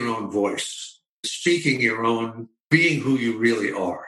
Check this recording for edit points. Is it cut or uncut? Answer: cut